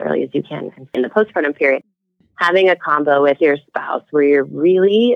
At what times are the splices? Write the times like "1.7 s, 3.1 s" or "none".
1.0 s